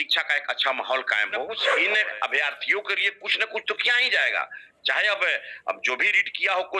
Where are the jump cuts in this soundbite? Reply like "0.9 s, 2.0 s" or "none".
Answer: 1.6 s